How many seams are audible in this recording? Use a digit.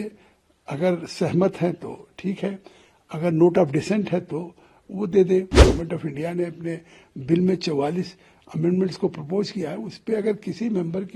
1